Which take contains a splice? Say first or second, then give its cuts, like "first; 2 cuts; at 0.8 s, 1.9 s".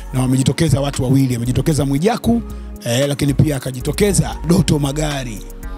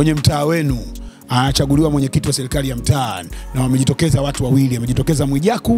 first; 1 cut; at 4.4 s